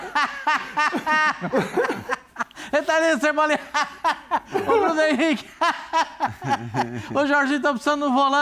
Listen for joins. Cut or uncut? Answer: uncut